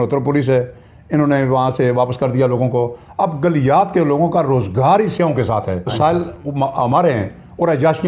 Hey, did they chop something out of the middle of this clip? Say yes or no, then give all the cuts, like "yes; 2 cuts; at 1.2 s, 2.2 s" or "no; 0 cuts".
yes; 1 cut; at 5.9 s